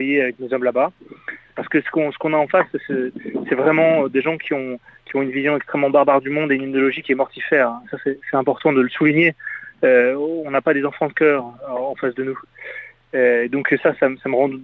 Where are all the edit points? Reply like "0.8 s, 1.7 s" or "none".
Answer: 1.5 s